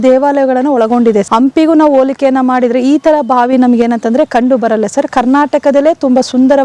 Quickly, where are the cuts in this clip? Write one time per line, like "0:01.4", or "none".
0:01.3